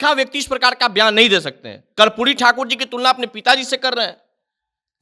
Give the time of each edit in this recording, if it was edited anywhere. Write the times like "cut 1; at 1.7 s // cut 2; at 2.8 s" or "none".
cut 1; at 1.8 s